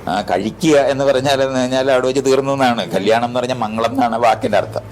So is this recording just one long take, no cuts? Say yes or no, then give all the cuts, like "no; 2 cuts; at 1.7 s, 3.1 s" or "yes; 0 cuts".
yes; 0 cuts